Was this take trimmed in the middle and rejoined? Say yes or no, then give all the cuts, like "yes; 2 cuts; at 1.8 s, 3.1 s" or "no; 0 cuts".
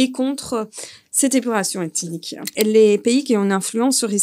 yes; 1 cut; at 2.4 s